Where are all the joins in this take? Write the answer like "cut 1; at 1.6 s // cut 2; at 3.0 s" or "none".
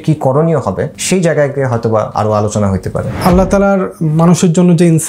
cut 1; at 0.9 s // cut 2; at 2.1 s // cut 3; at 3.1 s